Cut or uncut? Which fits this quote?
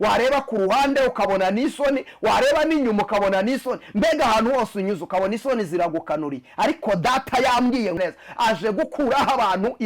cut